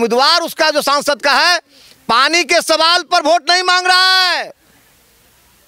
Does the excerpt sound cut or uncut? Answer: uncut